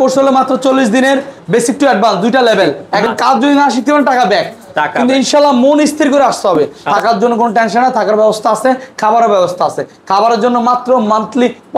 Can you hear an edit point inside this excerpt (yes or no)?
yes